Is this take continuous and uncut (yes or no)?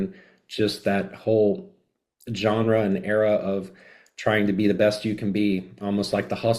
yes